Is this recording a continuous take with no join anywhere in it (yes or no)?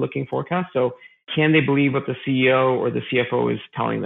yes